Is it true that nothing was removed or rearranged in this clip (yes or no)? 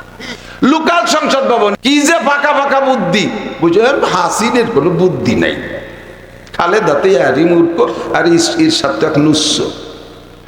no